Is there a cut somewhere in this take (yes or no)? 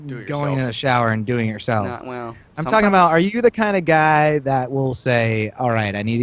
yes